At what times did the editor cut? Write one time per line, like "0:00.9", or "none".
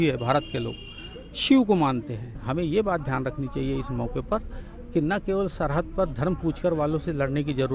0:02.4